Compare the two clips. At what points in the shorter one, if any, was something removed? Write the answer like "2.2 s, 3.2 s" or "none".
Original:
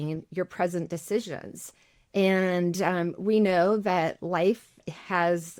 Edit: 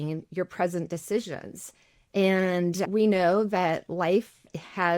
2.8 s